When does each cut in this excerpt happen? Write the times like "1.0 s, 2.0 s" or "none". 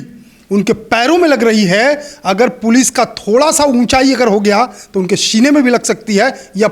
none